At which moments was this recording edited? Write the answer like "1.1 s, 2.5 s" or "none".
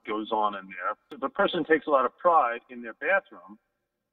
1.2 s